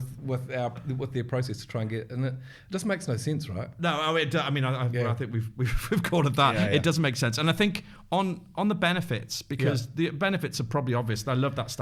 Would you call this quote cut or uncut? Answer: uncut